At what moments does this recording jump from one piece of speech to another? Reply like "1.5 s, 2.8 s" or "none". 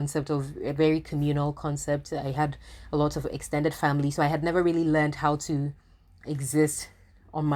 none